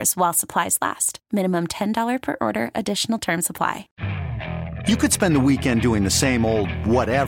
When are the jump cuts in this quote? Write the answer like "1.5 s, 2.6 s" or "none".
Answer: 3.9 s